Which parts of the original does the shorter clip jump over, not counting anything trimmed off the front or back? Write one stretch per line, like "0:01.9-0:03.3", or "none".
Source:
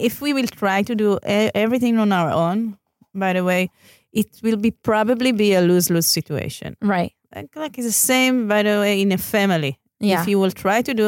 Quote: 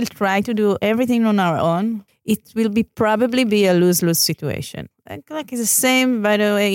0:01.2-0:01.5
0:02.8-0:04.0
0:06.7-0:07.1